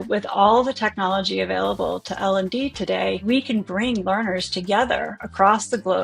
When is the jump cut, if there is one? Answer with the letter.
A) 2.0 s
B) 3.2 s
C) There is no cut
B